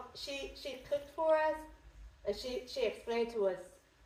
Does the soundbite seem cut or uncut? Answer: uncut